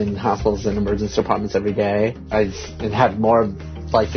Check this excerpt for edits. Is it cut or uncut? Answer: cut